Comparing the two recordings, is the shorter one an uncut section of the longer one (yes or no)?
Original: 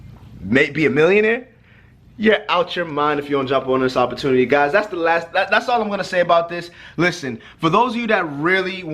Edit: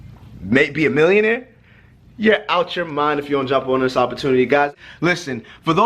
no